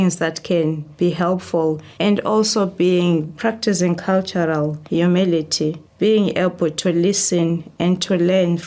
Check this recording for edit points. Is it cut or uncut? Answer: cut